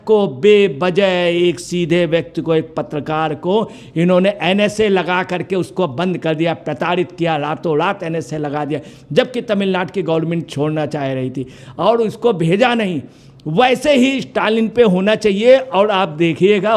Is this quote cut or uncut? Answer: uncut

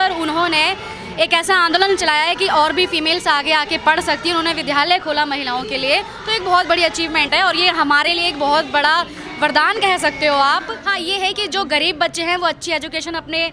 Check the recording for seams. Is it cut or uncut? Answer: cut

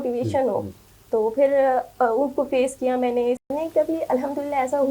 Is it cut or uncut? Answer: cut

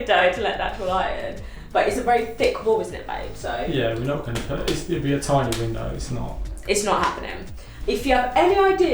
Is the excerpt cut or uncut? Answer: uncut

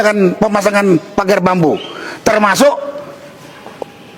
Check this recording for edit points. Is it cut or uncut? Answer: uncut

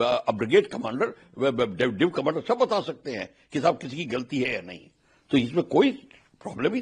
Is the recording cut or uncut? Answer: uncut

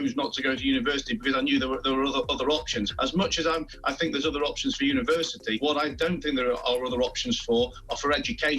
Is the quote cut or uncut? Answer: cut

